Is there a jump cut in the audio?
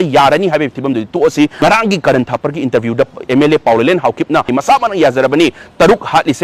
yes; 2 cuts; at 1.6 s, 4.5 s

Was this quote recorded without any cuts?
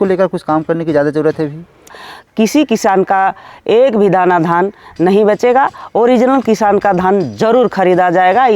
no; 1 cut; at 1.9 s

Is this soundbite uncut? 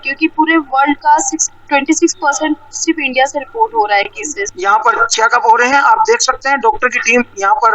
no; 1 cut; at 4.5 s

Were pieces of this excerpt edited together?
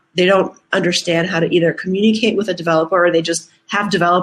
no; 0 cuts

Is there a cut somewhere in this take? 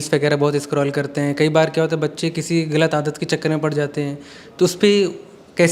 no; 0 cuts

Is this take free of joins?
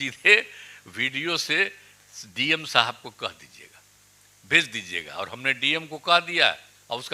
yes; 0 cuts

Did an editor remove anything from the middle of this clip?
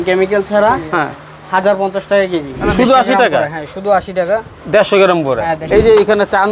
yes; 2 cuts; at 2.5 s, 5.6 s

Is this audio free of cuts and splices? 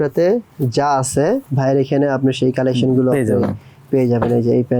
no; 1 cut; at 1.5 s

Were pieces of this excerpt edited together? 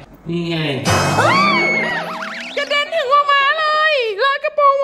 no; 0 cuts

